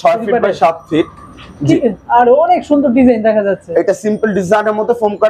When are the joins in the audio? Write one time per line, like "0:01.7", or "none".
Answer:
none